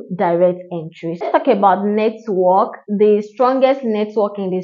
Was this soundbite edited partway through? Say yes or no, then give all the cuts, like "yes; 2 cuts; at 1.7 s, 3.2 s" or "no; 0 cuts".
yes; 1 cut; at 1.2 s